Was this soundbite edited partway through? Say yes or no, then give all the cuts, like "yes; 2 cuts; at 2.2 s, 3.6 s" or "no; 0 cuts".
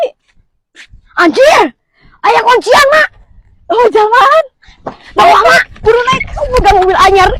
no; 0 cuts